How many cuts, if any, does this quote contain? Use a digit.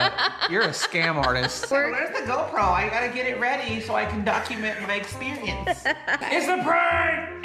2